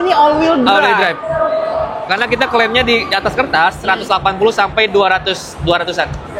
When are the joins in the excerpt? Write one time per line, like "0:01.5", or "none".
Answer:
0:02.1